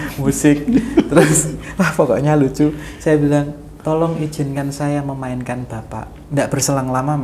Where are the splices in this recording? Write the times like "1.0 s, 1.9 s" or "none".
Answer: 6.2 s